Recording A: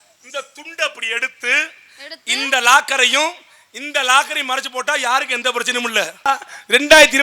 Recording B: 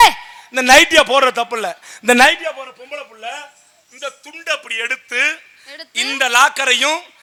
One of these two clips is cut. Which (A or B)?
A